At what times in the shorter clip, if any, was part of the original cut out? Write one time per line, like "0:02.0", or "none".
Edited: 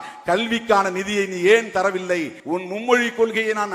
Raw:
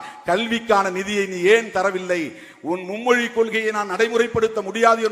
0:02.3